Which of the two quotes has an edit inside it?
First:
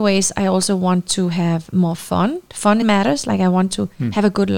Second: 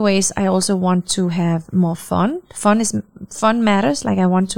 first; 1 cut; at 2.8 s

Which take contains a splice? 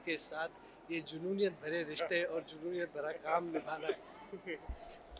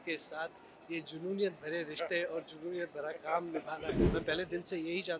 second; 1 cut; at 4.0 s

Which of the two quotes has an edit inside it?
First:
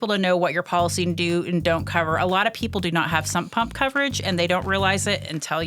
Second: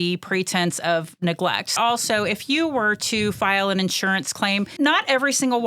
second; 2 cuts; at 1.8 s, 4.7 s

